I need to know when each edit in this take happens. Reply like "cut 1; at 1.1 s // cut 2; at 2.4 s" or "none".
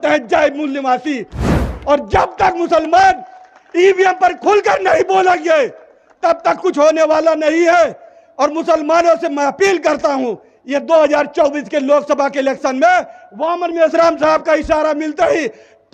cut 1; at 1.6 s